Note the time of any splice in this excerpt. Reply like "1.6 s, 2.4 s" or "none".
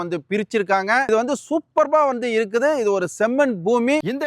none